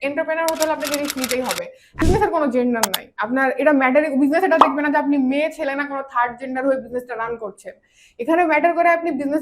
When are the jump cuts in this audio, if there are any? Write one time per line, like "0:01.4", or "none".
0:02.0